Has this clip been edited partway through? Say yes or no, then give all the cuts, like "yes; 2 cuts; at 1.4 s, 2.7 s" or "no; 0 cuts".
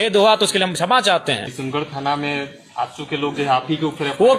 yes; 1 cut; at 1.5 s